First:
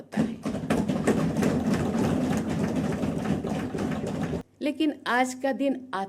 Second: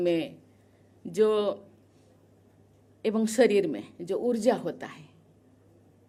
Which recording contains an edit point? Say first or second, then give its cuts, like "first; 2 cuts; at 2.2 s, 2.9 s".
first; 1 cut; at 4.4 s